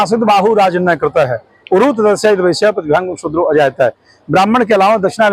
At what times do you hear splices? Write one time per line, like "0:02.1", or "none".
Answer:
none

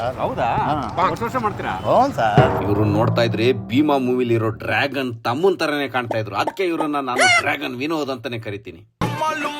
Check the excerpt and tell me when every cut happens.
0:02.6

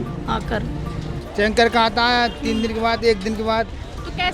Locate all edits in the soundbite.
0:01.2

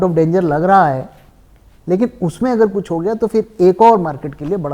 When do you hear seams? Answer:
none

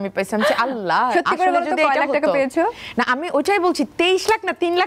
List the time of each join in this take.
0:02.8

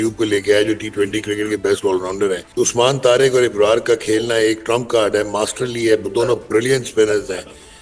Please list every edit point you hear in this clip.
0:02.4

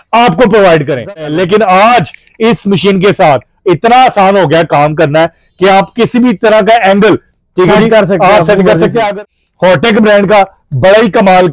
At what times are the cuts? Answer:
0:01.2
0:09.1

